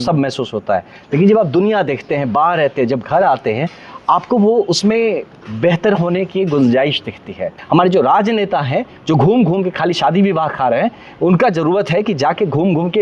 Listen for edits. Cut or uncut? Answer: cut